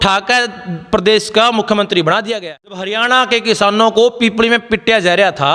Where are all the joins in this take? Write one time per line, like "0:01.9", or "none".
0:03.0